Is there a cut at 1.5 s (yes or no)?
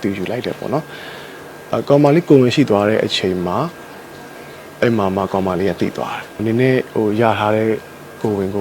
no